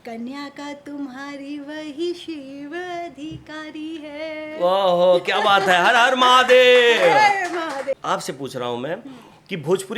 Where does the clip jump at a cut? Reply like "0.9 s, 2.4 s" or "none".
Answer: 8.0 s